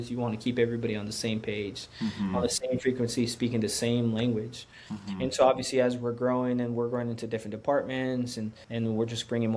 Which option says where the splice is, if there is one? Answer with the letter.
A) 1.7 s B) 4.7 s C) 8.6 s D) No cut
C